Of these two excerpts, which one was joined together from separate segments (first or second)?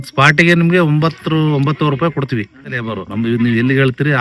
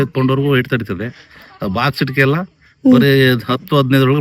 first